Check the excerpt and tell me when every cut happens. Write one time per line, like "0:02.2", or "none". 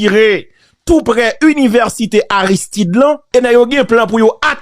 0:03.2